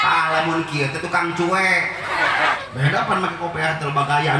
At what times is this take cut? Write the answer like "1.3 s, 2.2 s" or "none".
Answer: 2.6 s

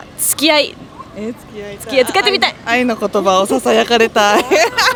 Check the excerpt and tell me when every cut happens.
none

